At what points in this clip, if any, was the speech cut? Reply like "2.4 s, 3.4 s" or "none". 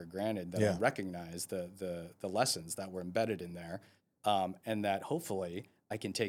none

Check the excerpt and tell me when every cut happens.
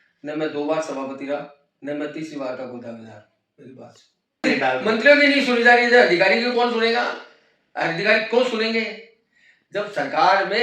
4.4 s

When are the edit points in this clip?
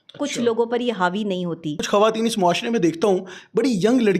1.8 s

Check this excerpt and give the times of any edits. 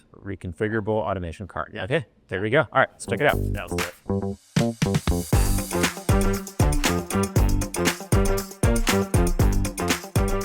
3.3 s

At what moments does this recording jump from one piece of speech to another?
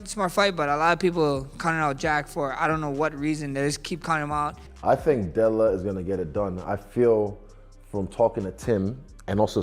4.7 s

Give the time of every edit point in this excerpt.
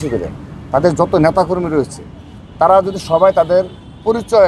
none

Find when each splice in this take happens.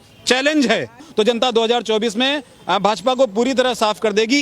1.0 s

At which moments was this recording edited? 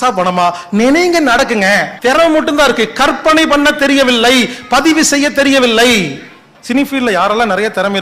1.9 s, 6.5 s

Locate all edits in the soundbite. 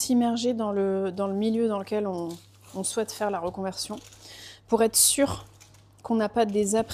none

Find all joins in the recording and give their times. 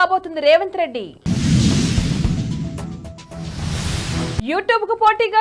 none

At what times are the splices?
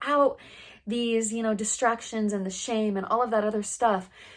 none

